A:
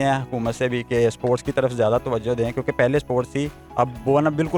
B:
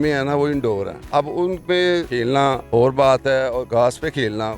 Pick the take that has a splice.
B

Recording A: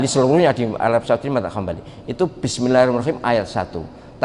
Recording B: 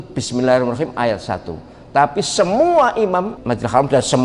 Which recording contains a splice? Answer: B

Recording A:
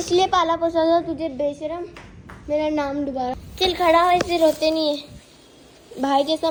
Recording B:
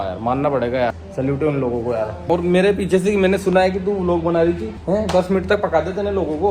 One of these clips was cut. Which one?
B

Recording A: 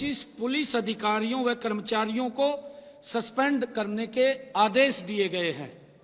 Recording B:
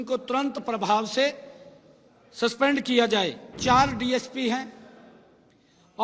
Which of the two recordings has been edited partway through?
B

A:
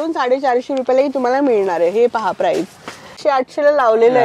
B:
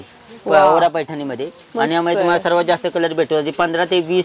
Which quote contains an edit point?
A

